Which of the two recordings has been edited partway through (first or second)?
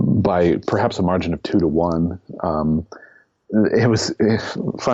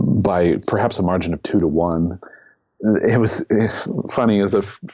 second